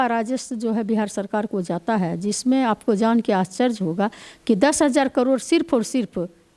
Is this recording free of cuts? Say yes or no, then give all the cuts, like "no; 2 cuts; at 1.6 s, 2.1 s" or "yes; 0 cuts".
yes; 0 cuts